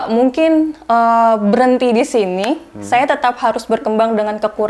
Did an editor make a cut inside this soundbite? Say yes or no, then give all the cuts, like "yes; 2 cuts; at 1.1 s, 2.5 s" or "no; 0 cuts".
no; 0 cuts